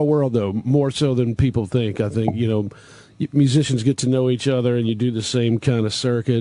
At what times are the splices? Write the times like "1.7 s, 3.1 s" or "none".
none